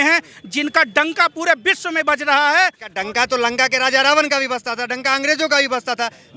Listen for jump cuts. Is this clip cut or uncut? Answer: cut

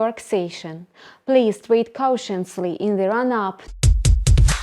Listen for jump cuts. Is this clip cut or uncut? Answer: cut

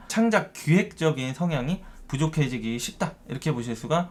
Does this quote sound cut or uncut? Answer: uncut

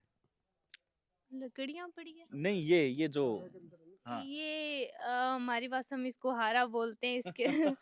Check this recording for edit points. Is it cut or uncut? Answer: uncut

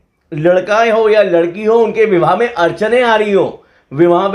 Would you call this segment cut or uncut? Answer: uncut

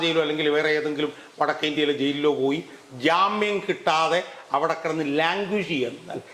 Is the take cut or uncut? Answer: uncut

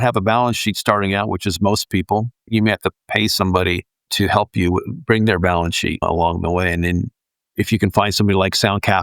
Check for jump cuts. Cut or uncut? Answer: cut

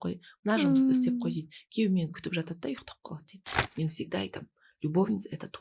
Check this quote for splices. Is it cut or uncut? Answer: cut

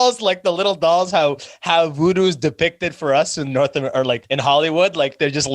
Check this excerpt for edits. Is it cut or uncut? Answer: cut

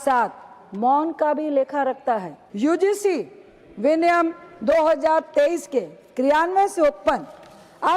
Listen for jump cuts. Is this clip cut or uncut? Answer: cut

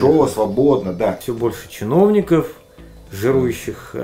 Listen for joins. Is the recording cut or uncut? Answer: cut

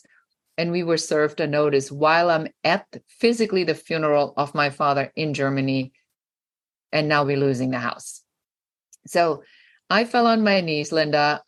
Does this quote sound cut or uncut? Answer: uncut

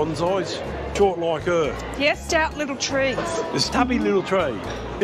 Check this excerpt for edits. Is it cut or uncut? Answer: cut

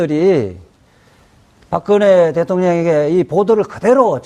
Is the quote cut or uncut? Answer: cut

